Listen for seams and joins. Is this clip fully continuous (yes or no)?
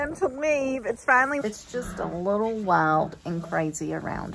no